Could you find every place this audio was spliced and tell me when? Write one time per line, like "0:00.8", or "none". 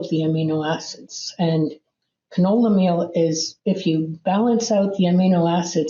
0:03.5